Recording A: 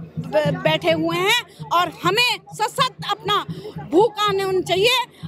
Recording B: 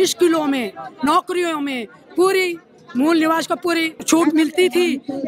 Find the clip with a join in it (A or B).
B